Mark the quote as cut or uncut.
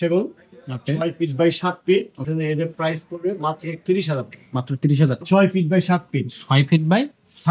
cut